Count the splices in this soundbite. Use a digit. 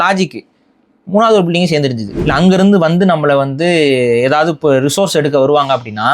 1